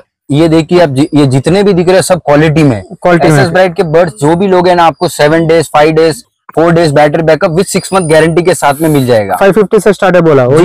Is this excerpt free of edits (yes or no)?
yes